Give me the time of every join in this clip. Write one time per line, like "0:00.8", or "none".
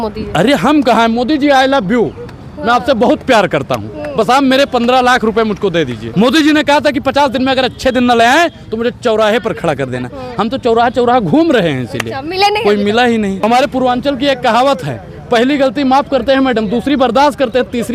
0:06.0
0:13.4